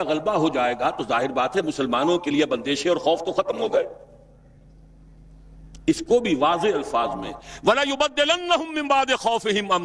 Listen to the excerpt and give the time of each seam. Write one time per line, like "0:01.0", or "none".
none